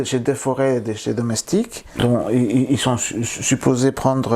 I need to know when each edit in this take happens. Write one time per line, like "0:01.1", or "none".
0:02.0